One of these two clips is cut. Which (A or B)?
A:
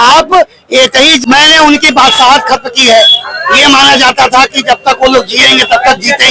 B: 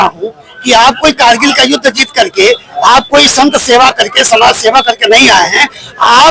A